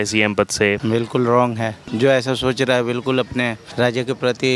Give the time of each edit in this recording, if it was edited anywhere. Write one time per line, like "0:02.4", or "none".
0:00.8
0:01.8
0:03.6